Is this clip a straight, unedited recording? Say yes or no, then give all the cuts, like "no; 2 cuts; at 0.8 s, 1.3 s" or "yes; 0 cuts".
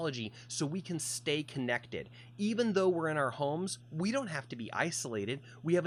yes; 0 cuts